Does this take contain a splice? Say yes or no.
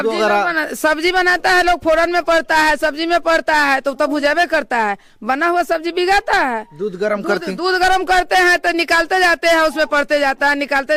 no